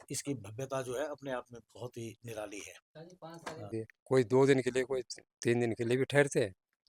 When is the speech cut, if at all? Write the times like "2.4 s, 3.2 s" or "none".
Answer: 3.7 s